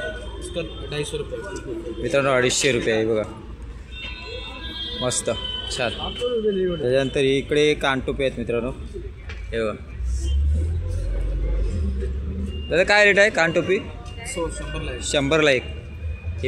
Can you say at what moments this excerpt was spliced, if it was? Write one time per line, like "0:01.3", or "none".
none